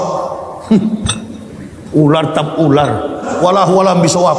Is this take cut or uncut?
cut